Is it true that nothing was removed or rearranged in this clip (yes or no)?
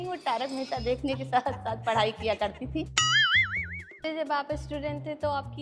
no